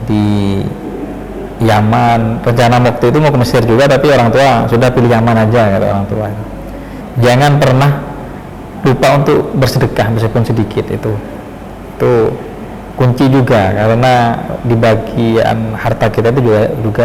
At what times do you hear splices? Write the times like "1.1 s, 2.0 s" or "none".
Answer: 7.0 s